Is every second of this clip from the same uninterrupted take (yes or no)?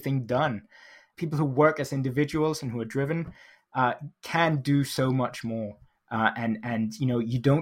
no